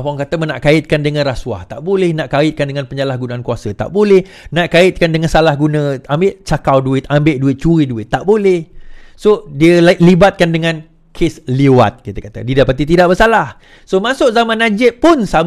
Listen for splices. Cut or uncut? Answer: uncut